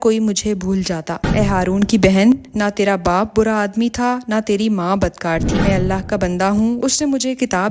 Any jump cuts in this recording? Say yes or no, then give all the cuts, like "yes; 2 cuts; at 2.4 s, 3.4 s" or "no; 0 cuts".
yes; 2 cuts; at 1.3 s, 5.6 s